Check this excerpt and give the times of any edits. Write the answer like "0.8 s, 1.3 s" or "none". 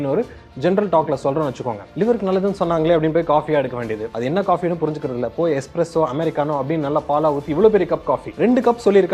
1.8 s